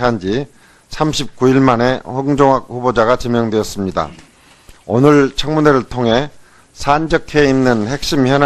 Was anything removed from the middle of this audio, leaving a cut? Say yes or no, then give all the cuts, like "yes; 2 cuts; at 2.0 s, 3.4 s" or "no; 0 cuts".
no; 0 cuts